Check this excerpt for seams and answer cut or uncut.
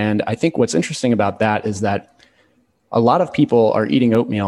uncut